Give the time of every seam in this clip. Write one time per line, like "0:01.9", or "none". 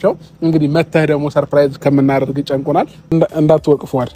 0:03.0

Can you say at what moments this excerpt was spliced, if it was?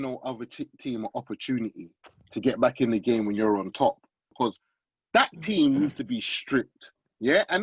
0:04.3

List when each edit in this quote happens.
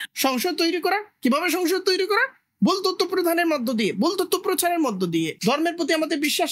0:05.3

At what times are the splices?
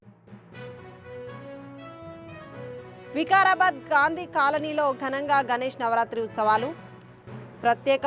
0:02.9

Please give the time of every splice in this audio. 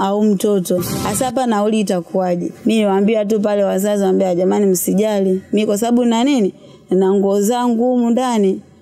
0:01.0
0:02.5

